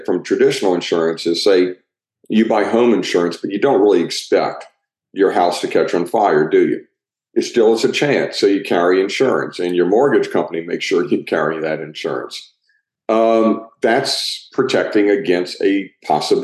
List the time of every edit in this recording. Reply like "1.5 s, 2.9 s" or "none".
none